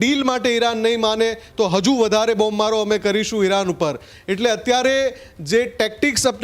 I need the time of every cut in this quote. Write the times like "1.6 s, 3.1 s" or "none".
none